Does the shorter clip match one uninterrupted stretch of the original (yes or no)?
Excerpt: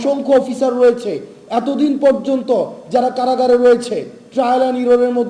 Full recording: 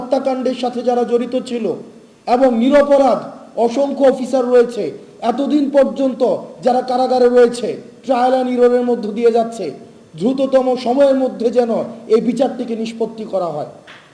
yes